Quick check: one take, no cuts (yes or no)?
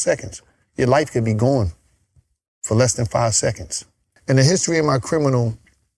no